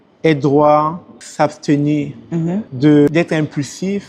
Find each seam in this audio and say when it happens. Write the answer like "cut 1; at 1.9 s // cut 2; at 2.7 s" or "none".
none